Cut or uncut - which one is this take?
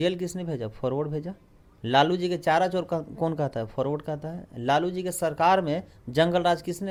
uncut